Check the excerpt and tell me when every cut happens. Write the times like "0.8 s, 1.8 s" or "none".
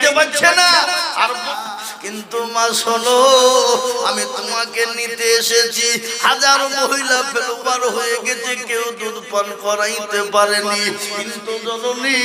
1.5 s